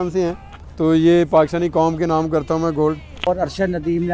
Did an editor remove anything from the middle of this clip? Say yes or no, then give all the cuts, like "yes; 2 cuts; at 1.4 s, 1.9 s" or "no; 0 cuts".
yes; 1 cut; at 3.1 s